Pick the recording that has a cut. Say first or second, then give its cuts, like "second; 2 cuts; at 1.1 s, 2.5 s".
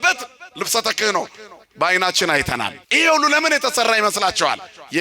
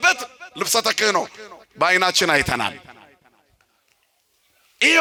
first; 1 cut; at 2.8 s